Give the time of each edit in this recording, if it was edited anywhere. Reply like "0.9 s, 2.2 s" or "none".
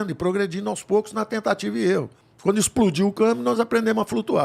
none